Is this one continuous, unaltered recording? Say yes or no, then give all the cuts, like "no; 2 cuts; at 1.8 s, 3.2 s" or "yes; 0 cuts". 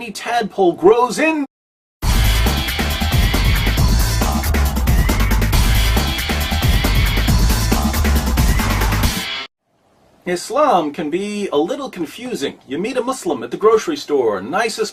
yes; 0 cuts